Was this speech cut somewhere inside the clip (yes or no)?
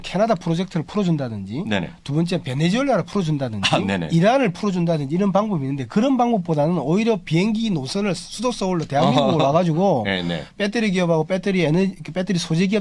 no